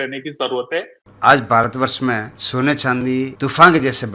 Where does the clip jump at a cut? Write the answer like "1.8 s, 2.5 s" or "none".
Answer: 1.0 s, 2.4 s, 3.3 s

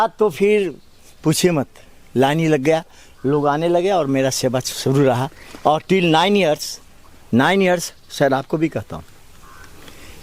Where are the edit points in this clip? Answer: none

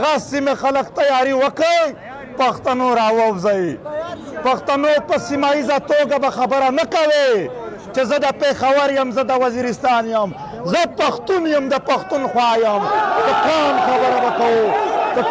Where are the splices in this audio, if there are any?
none

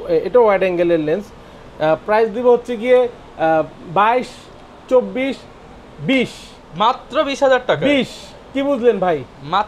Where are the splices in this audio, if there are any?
none

